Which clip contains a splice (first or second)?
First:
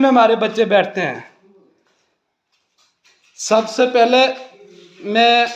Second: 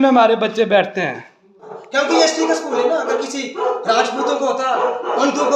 second